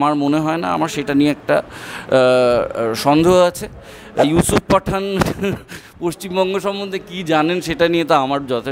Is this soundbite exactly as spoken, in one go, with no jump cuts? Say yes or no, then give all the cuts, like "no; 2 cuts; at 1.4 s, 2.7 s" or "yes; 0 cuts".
no; 1 cut; at 4.2 s